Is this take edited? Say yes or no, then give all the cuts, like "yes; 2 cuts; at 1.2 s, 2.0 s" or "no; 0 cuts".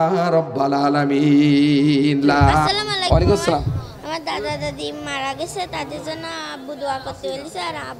yes; 1 cut; at 2.6 s